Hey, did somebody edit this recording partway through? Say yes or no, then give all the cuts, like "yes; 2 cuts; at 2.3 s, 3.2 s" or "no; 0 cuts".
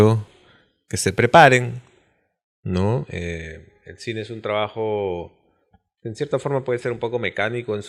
no; 0 cuts